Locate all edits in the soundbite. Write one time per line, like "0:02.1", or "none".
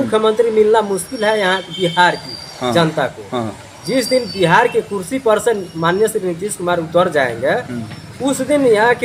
none